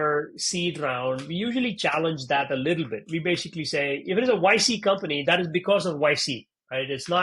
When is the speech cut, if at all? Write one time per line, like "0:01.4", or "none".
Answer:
none